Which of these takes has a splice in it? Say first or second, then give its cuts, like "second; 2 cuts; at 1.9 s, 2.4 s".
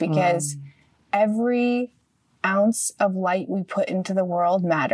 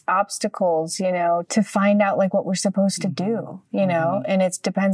second; 1 cut; at 1.5 s